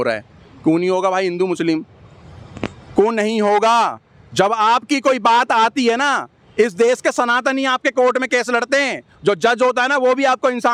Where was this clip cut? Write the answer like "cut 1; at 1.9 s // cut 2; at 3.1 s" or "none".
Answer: none